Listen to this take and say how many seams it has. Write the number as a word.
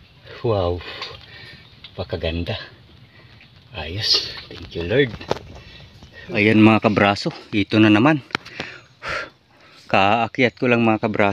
one